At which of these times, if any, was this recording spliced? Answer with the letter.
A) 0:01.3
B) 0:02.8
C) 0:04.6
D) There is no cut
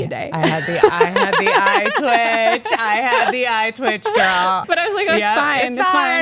C